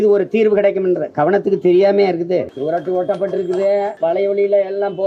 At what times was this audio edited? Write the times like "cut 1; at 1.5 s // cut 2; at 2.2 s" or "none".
cut 1; at 2.5 s // cut 2; at 3.9 s